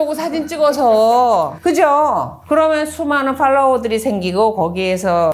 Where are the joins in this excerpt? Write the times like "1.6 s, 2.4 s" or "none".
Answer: none